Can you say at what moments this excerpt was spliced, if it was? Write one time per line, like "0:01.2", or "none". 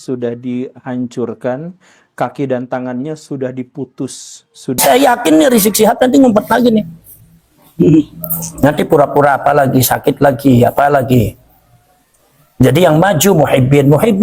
0:04.8